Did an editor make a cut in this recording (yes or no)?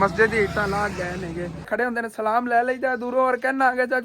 yes